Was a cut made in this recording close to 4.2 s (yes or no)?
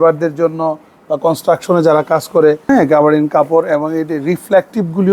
no